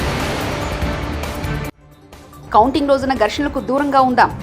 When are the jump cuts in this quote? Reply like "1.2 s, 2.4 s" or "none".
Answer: 1.6 s